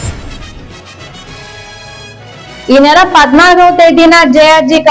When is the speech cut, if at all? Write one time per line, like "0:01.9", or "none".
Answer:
0:02.7